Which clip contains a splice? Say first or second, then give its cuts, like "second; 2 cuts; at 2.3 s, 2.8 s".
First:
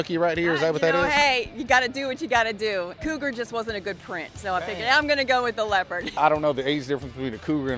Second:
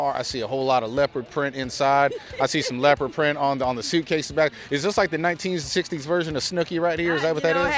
first; 2 cuts; at 2.9 s, 6.2 s